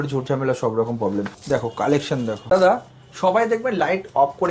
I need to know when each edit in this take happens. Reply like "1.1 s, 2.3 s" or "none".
1.4 s, 2.4 s